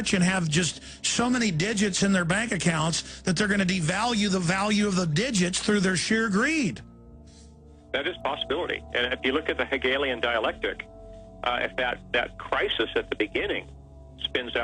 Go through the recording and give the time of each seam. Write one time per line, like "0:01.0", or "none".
0:08.3